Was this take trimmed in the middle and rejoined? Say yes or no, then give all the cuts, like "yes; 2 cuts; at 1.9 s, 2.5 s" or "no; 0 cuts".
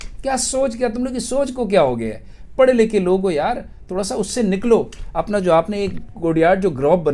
no; 0 cuts